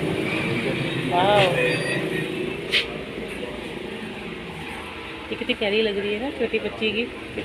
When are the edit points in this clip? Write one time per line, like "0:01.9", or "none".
none